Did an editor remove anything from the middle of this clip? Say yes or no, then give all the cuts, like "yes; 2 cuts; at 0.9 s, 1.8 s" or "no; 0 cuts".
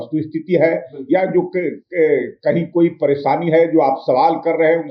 no; 0 cuts